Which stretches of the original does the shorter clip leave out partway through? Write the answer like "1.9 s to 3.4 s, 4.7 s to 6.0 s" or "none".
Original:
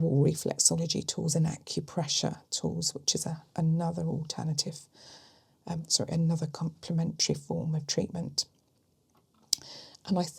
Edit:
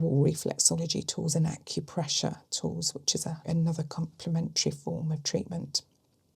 3.4 s to 6.1 s